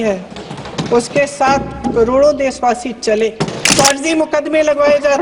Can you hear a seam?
yes; 1 cut; at 3.6 s

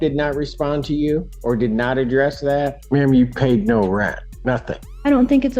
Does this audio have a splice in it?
yes; 3 cuts; at 1.3 s, 2.8 s, 4.6 s

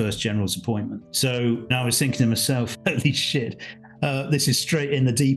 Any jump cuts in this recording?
yes; 2 cuts; at 1.1 s, 1.7 s

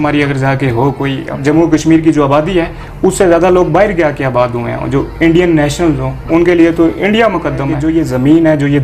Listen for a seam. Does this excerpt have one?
yes; 2 cuts; at 1.3 s, 7.8 s

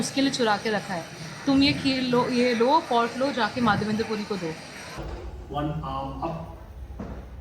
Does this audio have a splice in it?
yes; 1 cut; at 4.9 s

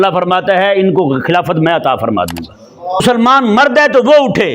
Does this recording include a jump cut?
yes; 1 cut; at 3.0 s

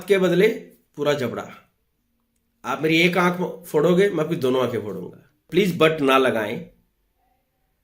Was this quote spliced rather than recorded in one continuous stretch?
yes; 1 cut; at 5.4 s

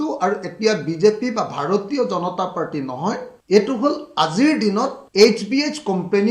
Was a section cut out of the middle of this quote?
no; 0 cuts

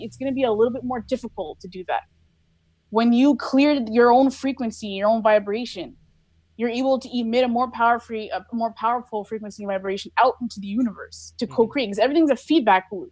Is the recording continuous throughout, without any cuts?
yes; 0 cuts

